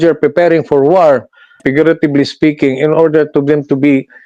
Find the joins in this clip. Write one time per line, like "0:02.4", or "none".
0:01.6